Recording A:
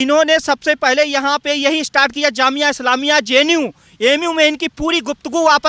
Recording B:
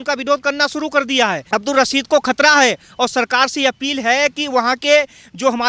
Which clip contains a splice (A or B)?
B